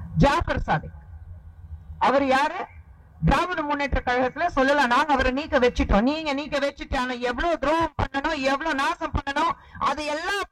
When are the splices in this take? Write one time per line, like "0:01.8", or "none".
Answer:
none